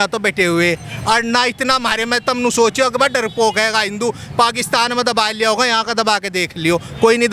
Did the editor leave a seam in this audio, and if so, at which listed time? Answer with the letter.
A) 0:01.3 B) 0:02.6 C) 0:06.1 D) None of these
D